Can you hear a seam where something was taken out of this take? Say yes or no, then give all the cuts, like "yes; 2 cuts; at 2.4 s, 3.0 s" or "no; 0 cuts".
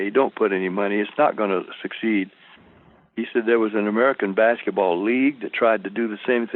no; 0 cuts